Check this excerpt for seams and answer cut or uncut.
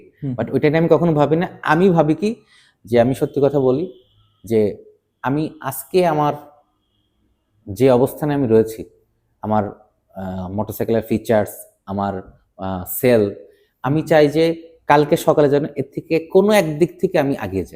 uncut